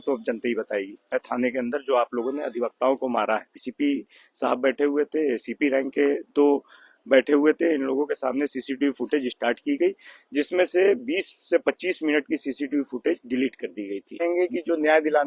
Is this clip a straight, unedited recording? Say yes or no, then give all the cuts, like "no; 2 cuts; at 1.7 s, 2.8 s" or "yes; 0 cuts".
no; 3 cuts; at 1.1 s, 3.6 s, 14.2 s